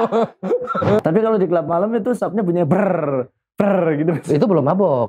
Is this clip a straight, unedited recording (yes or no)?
no